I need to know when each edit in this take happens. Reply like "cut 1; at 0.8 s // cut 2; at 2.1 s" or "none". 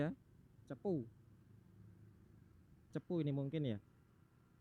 cut 1; at 2.9 s